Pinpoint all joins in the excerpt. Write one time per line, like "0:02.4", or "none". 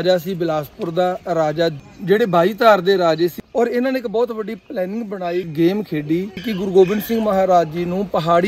0:01.8
0:03.4
0:05.5
0:06.5

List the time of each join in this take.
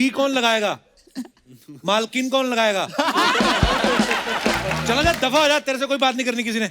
0:04.8

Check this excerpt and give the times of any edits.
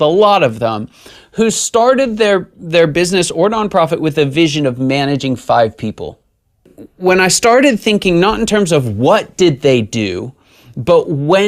0:06.8

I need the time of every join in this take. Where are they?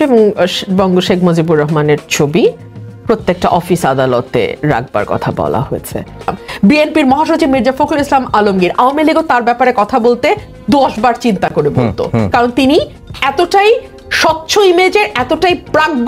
0:06.4

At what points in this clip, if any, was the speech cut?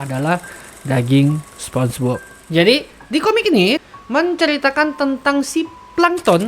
0:03.8

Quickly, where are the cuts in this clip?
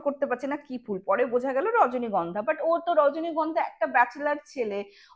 none

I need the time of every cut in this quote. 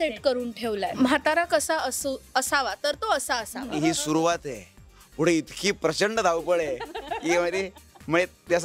0:00.9
0:03.7

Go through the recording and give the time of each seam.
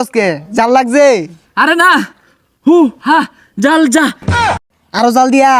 0:04.4

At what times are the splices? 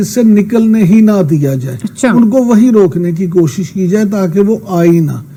none

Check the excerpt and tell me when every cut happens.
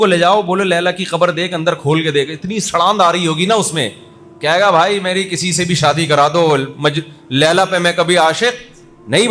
none

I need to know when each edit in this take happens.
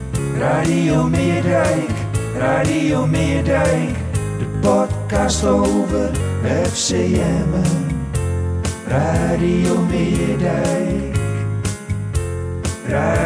none

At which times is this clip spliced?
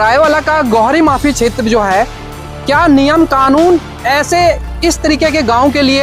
none

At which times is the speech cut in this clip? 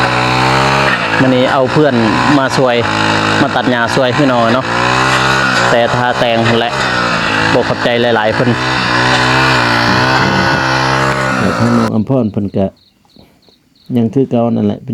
0:11.5

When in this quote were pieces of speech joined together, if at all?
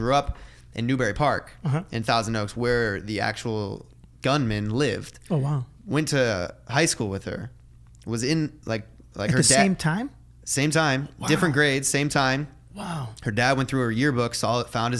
none

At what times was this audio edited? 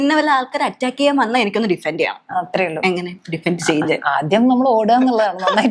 none

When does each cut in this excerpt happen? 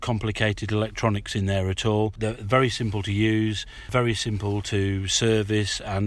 0:02.2
0:03.9

